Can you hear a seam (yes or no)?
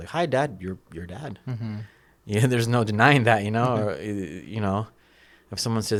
no